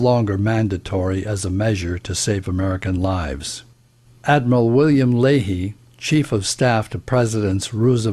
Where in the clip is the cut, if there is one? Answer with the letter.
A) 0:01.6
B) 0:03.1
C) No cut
B